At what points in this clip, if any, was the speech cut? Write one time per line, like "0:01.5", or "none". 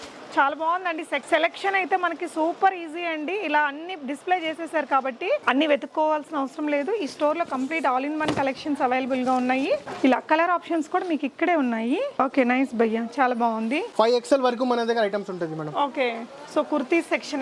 0:01.2
0:05.4
0:13.9